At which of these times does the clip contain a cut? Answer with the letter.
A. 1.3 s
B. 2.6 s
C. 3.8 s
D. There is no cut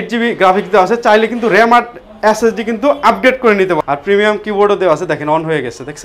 C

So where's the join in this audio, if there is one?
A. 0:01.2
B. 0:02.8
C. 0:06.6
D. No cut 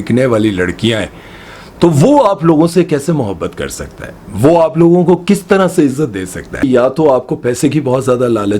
C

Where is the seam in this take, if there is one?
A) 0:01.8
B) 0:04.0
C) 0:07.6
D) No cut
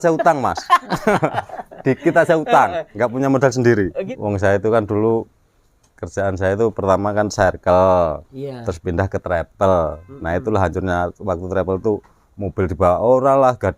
B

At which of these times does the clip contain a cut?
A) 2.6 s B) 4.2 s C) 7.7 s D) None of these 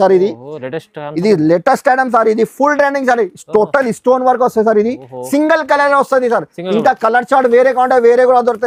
D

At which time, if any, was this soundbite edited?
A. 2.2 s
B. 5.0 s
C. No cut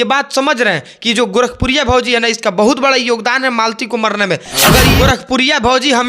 B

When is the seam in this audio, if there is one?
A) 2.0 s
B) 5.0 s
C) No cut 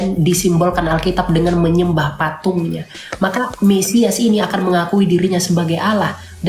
C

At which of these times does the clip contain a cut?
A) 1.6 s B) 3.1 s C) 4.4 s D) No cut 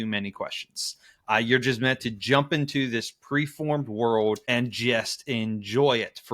C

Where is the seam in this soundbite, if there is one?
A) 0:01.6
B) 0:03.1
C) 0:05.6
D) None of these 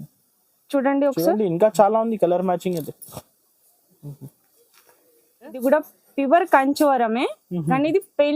C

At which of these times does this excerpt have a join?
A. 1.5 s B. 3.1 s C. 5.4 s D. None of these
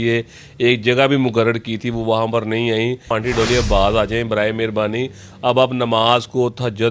B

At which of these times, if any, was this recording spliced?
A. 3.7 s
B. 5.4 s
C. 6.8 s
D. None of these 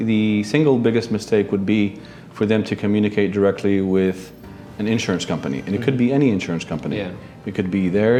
D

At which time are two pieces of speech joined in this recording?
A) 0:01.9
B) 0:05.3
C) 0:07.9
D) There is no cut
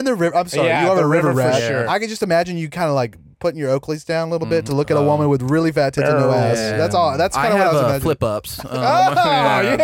A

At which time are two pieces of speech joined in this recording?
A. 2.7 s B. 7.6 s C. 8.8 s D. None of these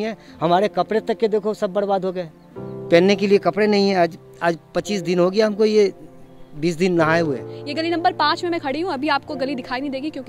B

